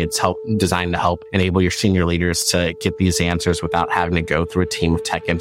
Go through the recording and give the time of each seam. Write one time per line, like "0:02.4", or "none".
none